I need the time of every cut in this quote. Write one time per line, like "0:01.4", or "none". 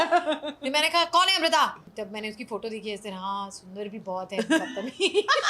0:01.9